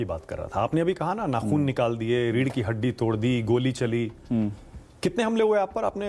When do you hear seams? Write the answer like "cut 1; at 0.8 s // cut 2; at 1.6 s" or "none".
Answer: none